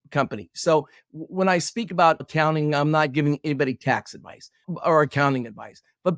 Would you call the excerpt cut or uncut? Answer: uncut